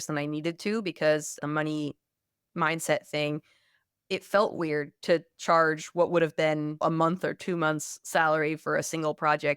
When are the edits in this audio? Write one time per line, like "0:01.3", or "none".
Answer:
0:01.4